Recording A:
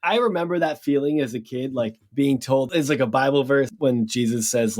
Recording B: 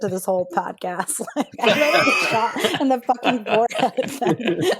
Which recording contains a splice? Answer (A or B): A